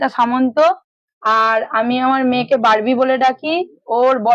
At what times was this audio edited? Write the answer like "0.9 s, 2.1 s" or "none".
2.2 s